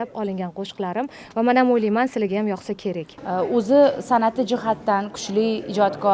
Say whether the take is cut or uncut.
cut